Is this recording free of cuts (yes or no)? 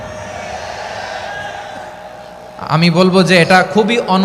yes